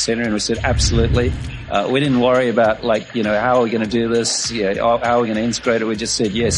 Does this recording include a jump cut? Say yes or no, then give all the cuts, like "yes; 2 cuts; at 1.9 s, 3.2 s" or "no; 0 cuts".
no; 0 cuts